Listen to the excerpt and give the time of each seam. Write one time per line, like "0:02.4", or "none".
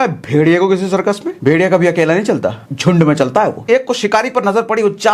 0:01.3
0:02.6
0:03.6